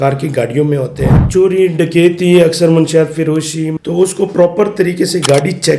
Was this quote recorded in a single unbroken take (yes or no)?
no